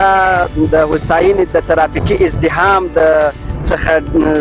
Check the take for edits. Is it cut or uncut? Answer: uncut